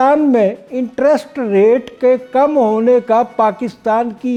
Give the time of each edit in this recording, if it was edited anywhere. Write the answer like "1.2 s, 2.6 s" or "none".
none